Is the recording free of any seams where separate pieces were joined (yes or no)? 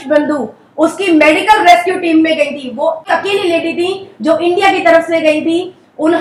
yes